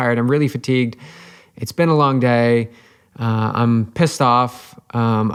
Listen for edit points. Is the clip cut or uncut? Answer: uncut